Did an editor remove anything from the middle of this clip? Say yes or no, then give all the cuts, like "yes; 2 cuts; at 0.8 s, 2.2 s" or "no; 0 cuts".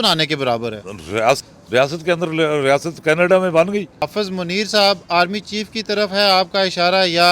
yes; 2 cuts; at 1.5 s, 4.1 s